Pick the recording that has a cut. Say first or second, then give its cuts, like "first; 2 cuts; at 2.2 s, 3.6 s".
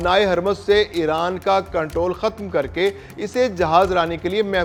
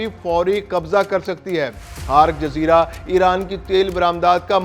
second; 1 cut; at 1.9 s